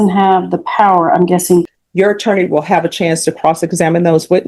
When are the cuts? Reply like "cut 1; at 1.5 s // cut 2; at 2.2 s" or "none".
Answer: cut 1; at 1.7 s